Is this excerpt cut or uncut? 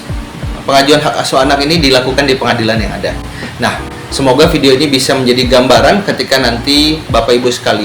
uncut